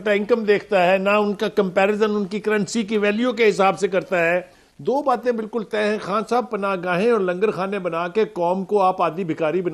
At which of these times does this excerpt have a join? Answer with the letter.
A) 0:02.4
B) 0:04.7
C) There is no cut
B